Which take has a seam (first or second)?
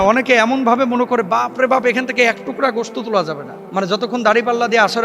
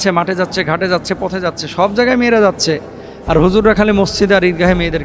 first